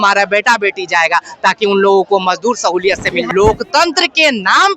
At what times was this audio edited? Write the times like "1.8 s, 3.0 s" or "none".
3.2 s